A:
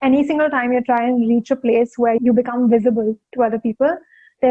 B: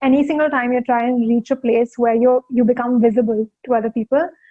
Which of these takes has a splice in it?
A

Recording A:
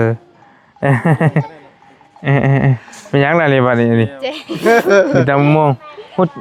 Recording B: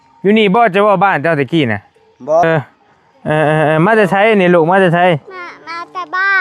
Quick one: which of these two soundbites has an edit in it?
B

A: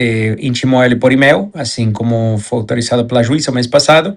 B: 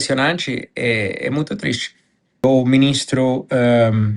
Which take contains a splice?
B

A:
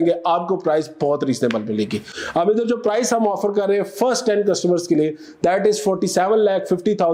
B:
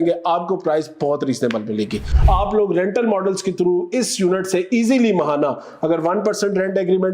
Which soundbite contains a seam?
B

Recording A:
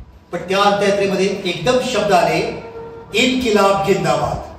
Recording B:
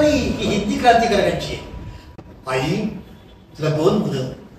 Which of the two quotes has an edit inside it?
B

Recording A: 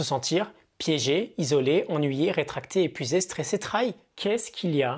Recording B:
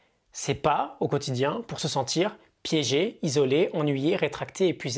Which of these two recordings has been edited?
A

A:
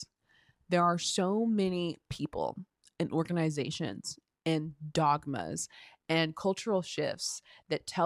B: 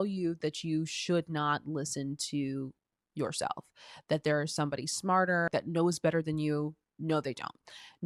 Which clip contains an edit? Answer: B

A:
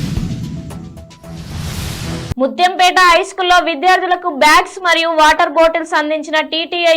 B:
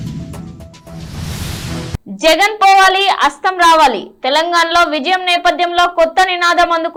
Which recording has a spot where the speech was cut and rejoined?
A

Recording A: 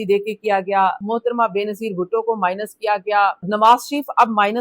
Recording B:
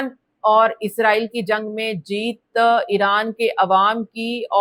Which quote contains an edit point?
A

